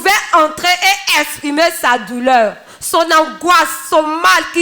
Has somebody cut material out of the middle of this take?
no; 0 cuts

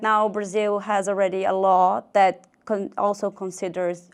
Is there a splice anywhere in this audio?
no; 0 cuts

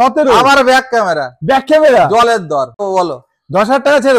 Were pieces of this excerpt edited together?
yes; 1 cut; at 2.8 s

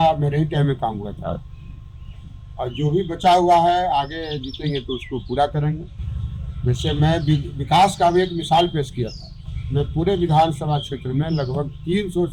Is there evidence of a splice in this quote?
no; 0 cuts

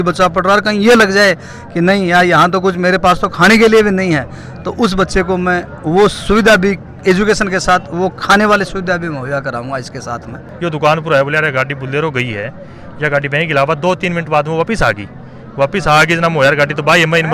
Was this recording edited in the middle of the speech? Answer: yes; 1 cut; at 10.4 s

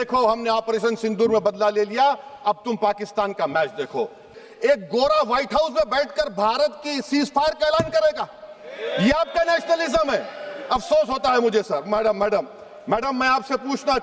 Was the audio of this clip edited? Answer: yes; 1 cut; at 4.4 s

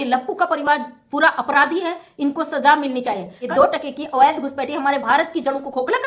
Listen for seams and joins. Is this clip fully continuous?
no; 1 cut; at 3.3 s

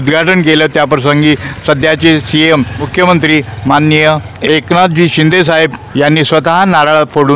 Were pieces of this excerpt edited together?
yes; 3 cuts; at 2.8 s, 4.3 s, 5.8 s

